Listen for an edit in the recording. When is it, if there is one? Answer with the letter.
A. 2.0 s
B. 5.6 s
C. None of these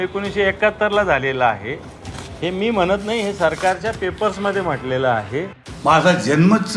B